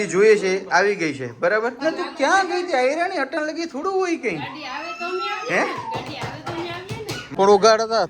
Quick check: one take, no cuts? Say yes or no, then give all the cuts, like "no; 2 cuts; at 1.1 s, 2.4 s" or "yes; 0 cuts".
no; 2 cuts; at 1.8 s, 7.2 s